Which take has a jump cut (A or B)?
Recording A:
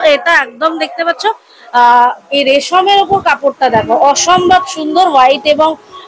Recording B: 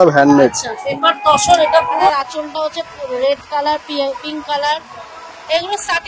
B